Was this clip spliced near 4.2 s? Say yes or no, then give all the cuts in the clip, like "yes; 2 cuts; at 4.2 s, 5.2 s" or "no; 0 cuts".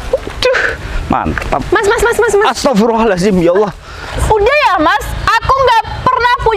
yes; 1 cut; at 4.2 s